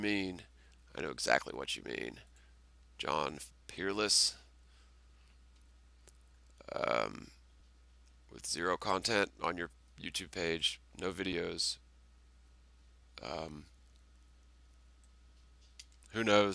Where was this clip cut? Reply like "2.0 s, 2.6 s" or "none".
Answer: none

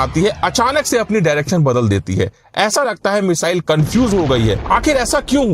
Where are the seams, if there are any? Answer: 4.6 s

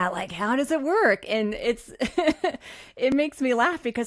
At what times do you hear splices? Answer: none

